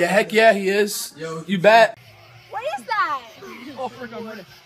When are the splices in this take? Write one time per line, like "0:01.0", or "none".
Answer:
0:01.9